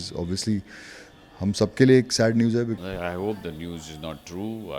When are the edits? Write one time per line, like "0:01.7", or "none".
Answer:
0:02.8

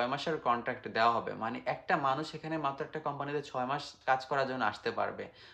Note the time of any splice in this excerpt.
0:03.9

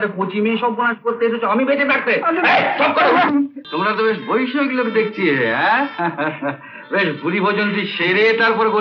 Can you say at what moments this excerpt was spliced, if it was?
0:03.6

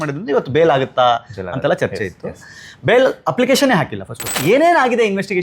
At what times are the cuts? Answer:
0:04.3

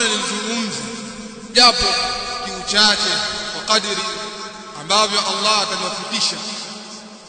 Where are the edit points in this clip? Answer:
0:01.4

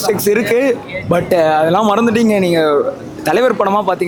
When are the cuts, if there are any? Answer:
none

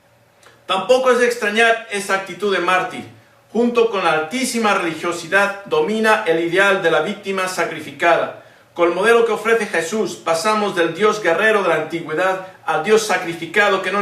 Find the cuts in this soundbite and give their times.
0:07.5

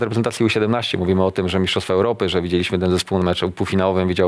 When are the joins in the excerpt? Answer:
0:03.2

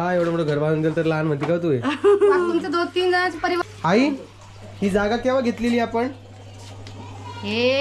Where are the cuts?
0:03.6

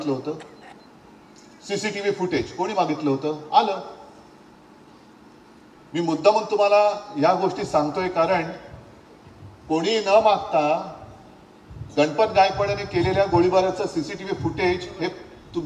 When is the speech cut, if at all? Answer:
none

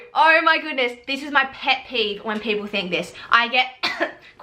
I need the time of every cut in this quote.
none

